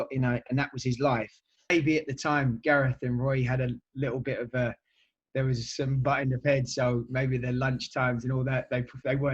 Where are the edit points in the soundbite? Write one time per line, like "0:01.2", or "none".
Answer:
0:01.7